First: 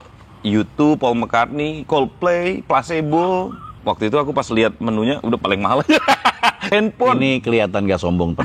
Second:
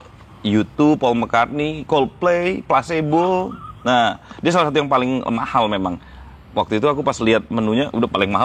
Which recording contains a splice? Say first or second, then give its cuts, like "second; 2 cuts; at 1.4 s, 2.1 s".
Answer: first; 2 cuts; at 3.6 s, 6.6 s